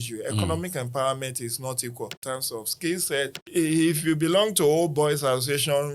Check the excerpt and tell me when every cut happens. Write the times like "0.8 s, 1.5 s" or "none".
2.2 s, 3.4 s